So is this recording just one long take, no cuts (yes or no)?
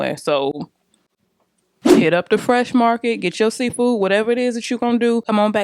yes